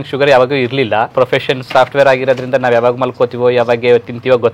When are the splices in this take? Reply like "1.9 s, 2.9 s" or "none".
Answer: 1.1 s